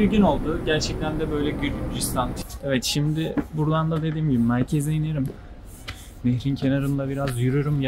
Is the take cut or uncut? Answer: cut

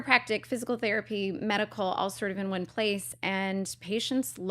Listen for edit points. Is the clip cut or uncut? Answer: cut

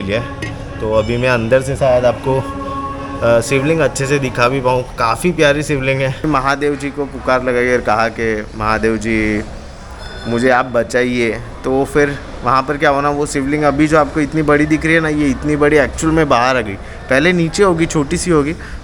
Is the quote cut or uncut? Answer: cut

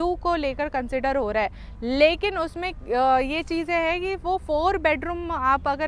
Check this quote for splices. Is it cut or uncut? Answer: uncut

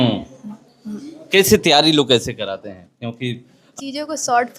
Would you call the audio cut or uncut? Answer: cut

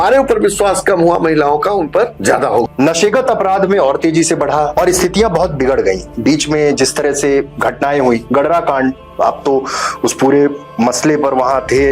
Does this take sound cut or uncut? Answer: cut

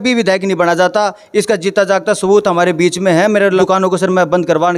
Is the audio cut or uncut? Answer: cut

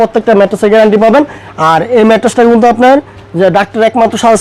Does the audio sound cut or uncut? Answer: cut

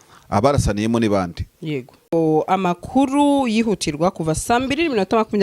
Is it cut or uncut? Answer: cut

